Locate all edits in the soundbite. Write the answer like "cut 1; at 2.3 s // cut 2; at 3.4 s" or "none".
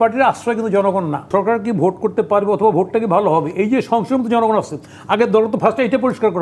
cut 1; at 1.3 s